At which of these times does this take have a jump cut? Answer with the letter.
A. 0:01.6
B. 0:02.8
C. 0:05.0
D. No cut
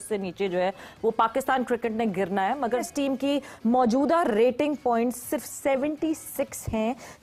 B